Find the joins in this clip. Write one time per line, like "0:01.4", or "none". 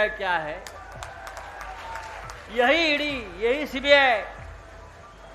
0:01.1